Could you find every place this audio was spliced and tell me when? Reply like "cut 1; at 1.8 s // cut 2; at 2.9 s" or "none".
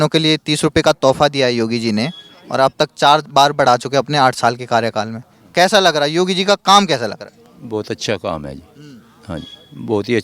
none